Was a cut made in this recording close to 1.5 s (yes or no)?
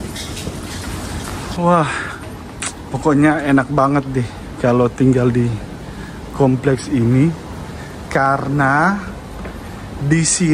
yes